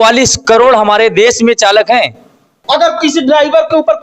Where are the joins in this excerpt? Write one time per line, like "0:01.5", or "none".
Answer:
0:02.5